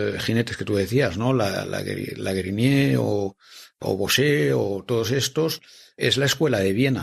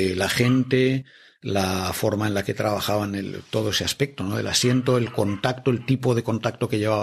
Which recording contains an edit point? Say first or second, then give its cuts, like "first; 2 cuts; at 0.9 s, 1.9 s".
first; 1 cut; at 6.0 s